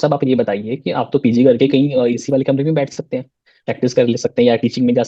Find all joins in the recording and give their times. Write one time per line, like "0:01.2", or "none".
none